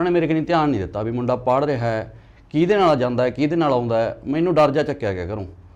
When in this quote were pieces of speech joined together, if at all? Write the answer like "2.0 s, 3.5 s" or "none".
none